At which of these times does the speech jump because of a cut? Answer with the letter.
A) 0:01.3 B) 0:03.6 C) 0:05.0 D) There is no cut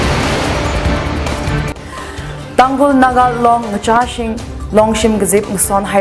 A